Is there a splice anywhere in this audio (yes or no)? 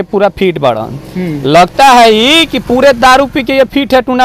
no